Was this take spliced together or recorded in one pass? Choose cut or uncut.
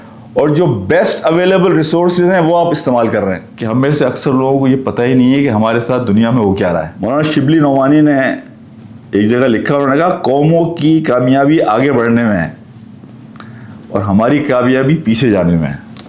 cut